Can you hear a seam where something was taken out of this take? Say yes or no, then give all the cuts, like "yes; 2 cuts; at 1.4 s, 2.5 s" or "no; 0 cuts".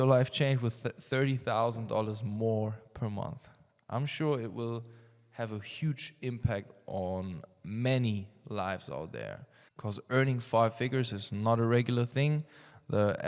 no; 0 cuts